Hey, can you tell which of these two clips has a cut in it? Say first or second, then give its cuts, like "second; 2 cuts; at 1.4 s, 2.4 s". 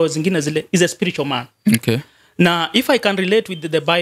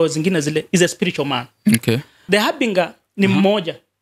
second; 1 cut; at 2.2 s